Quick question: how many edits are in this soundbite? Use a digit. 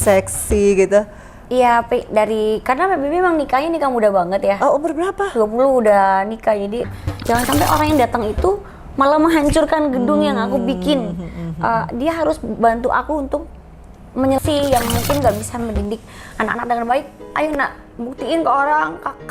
2